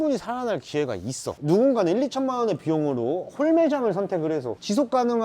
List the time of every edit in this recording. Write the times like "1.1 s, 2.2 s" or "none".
1.4 s